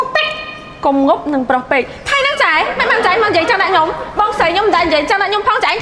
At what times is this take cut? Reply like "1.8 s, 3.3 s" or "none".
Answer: none